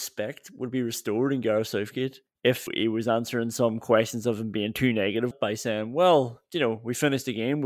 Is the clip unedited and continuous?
no; 2 cuts; at 2.7 s, 5.3 s

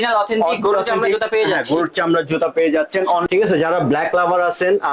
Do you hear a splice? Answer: yes; 1 cut; at 3.2 s

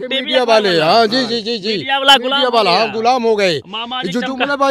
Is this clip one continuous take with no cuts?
yes; 0 cuts

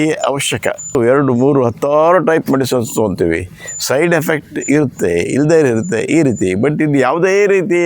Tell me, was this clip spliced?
yes; 1 cut; at 0.9 s

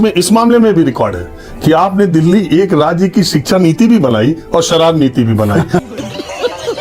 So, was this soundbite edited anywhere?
no; 0 cuts

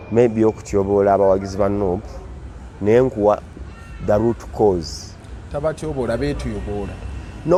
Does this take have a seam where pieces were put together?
no; 0 cuts

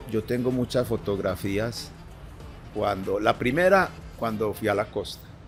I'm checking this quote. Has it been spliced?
no; 0 cuts

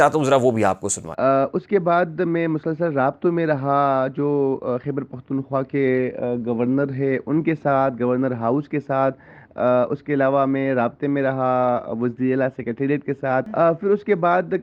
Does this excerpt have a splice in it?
yes; 1 cut; at 13.5 s

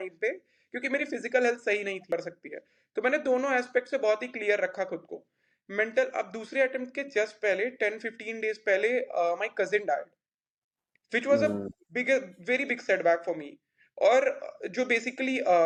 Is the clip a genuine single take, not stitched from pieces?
yes; 0 cuts

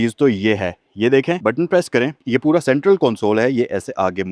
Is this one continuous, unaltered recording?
yes; 0 cuts

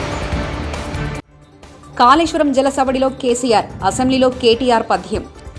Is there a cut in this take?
yes; 1 cut; at 1.1 s

